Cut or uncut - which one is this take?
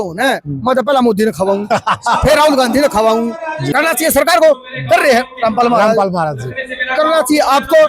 cut